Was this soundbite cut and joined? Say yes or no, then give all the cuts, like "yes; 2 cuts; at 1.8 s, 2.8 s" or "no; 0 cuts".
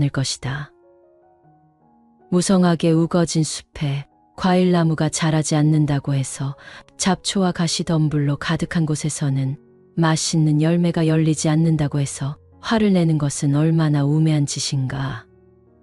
no; 0 cuts